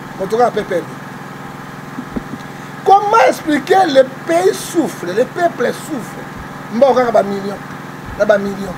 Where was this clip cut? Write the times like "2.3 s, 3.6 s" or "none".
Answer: none